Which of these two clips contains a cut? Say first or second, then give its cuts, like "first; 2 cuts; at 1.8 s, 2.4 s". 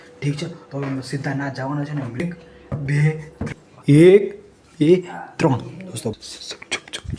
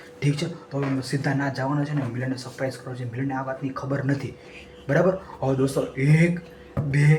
first; 3 cuts; at 2.2 s, 3.5 s, 6.1 s